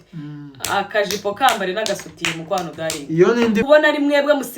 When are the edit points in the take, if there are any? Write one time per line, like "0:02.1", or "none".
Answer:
0:03.6